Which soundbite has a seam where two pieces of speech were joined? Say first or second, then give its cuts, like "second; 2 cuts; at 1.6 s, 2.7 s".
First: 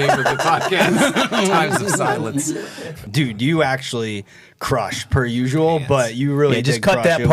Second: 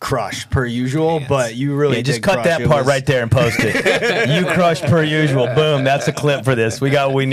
first; 1 cut; at 3.0 s